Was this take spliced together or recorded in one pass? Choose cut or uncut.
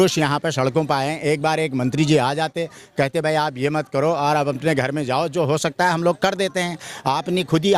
uncut